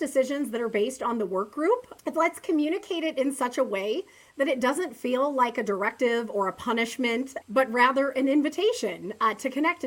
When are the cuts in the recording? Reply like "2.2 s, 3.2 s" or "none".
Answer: 1.9 s, 7.3 s